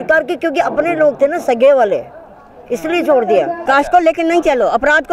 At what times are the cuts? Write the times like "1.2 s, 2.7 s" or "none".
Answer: 3.6 s